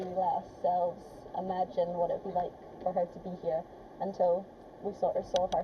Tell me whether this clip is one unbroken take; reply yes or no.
yes